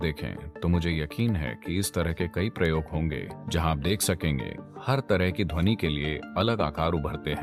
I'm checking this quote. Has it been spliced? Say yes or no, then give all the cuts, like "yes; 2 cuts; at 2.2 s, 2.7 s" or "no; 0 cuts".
no; 0 cuts